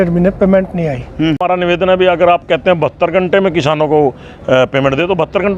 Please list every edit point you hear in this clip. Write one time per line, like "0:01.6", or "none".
0:01.4